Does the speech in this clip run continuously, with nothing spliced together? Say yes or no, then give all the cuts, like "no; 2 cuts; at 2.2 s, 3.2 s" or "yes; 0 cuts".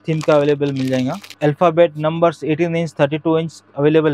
no; 1 cut; at 1.3 s